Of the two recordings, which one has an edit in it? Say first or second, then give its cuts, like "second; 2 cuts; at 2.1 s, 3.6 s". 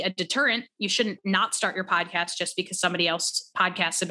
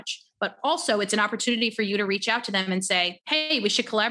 second; 1 cut; at 3.2 s